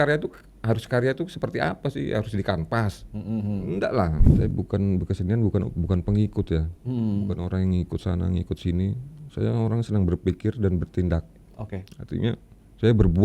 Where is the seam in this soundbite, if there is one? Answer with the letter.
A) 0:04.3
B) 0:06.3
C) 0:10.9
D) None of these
A